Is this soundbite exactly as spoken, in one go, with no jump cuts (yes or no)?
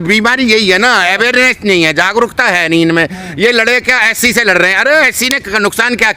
yes